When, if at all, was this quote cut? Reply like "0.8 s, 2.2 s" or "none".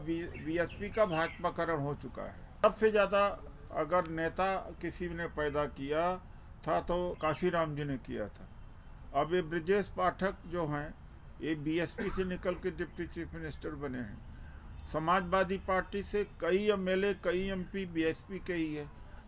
2.6 s, 7.2 s